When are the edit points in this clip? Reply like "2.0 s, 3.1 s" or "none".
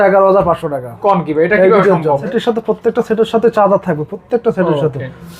2.2 s